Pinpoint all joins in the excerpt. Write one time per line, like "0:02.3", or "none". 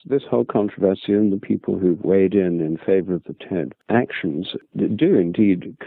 0:03.8
0:04.6